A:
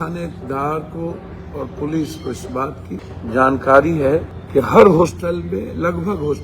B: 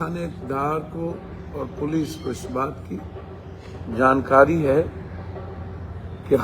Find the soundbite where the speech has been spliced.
A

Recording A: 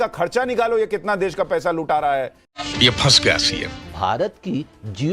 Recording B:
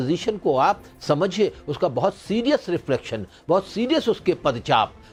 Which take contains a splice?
A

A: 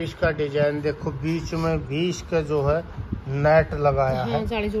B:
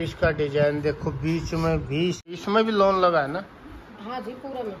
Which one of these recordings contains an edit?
B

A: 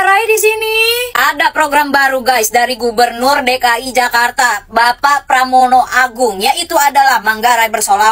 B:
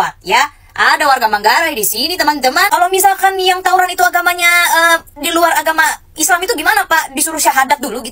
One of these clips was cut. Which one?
B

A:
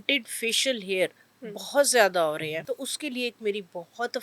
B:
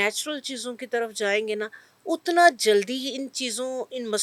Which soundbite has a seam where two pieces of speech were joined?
A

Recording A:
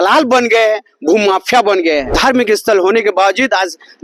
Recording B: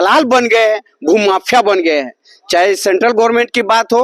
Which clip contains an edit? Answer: A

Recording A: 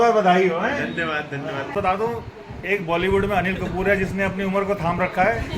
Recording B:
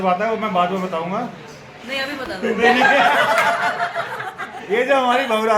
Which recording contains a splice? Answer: A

